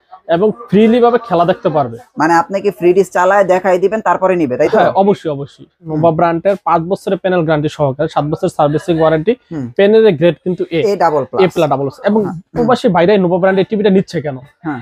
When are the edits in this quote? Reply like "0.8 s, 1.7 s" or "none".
5.9 s